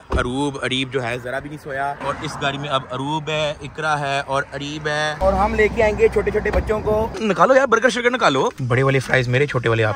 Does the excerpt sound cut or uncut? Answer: cut